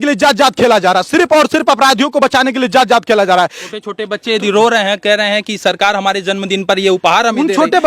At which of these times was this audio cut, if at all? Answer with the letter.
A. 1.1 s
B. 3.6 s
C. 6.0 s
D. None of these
B